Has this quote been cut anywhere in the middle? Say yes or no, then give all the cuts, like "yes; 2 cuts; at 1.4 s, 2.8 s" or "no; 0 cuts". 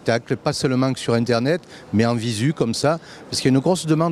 no; 0 cuts